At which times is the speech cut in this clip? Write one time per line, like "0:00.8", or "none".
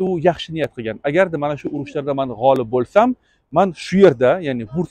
none